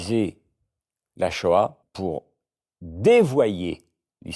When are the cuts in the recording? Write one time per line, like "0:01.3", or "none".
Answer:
0:01.9